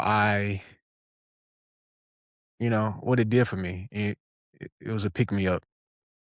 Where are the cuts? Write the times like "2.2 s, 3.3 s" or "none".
none